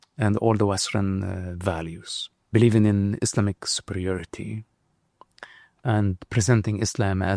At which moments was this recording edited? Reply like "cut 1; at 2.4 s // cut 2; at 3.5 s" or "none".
cut 1; at 2.5 s